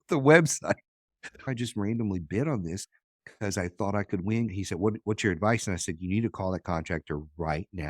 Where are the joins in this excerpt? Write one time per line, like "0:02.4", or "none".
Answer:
0:01.4
0:04.5